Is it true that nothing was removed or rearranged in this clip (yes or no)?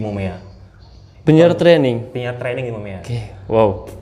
yes